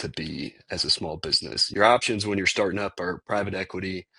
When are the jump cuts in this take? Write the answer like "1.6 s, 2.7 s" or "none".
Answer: 1.5 s